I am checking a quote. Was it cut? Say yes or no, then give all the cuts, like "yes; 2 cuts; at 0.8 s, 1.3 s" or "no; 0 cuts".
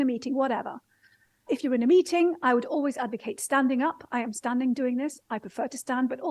yes; 1 cut; at 1.4 s